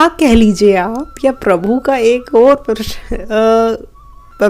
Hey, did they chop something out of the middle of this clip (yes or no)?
no